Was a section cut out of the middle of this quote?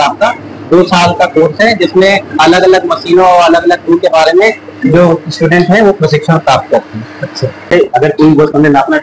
yes; 1 cut; at 7.7 s

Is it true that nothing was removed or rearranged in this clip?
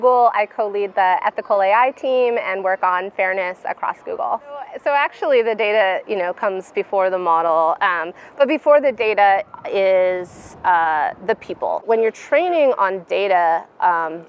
no; 2 cuts; at 4.7 s, 11.8 s

